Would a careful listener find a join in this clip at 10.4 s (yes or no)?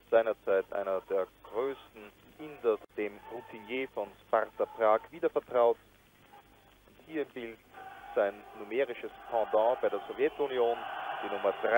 no